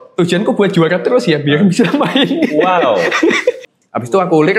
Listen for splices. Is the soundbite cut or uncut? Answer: cut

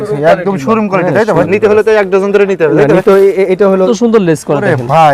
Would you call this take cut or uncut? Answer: cut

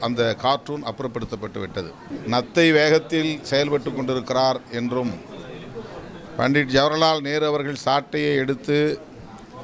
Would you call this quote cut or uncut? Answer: cut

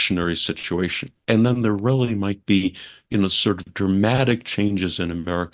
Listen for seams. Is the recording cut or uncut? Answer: cut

